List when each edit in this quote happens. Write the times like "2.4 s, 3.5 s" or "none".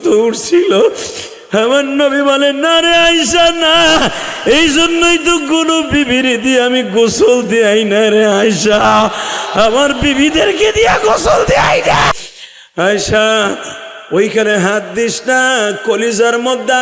12.1 s

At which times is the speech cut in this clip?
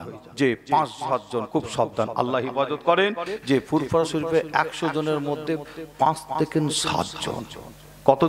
3.3 s

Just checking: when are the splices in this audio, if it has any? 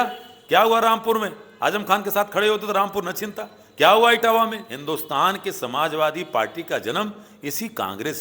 4.7 s

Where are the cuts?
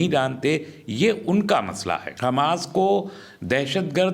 2.1 s

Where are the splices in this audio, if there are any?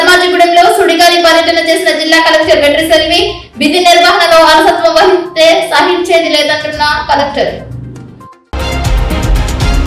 8.4 s

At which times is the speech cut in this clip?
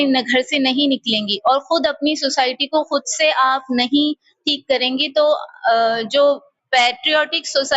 none

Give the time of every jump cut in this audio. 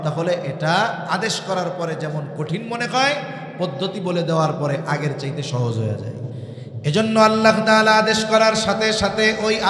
6.5 s

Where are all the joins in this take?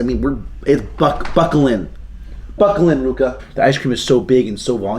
3.4 s

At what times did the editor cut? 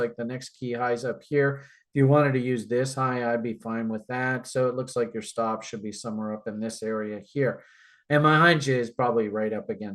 none

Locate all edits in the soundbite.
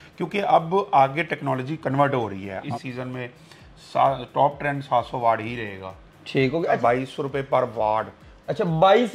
2.6 s, 6.8 s

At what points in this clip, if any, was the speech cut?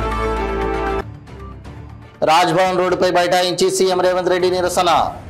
1.0 s

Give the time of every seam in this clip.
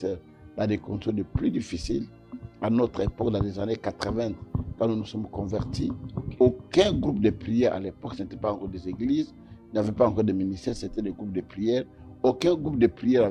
none

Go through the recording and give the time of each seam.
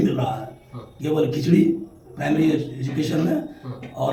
none

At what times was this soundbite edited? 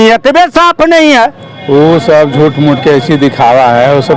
1.5 s

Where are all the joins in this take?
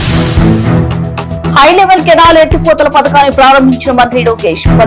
none

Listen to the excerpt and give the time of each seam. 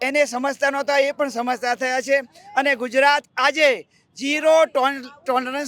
none

